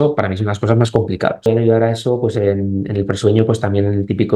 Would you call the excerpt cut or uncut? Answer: cut